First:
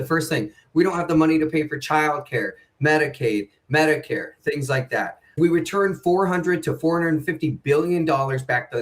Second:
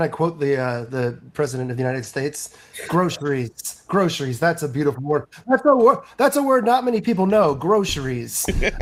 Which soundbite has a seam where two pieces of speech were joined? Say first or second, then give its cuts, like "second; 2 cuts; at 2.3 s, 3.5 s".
first; 1 cut; at 5.4 s